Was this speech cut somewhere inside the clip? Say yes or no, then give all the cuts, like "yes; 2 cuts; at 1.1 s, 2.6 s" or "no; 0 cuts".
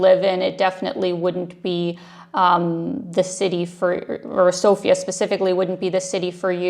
no; 0 cuts